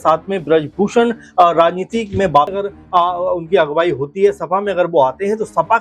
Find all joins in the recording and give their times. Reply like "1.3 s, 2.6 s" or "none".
2.6 s